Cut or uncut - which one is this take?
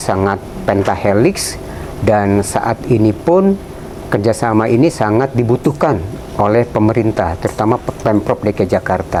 uncut